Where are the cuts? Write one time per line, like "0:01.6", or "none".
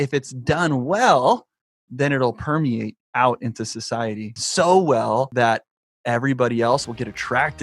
0:03.1
0:04.3
0:05.3
0:06.8